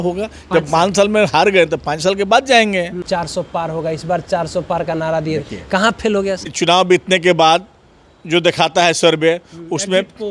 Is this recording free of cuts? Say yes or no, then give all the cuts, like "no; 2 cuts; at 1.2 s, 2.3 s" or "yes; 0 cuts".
no; 2 cuts; at 3.0 s, 6.9 s